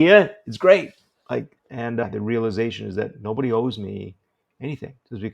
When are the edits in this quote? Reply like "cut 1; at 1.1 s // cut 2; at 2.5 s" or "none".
cut 1; at 1.6 s